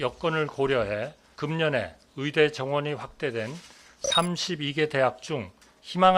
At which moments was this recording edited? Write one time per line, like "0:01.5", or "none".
0:01.2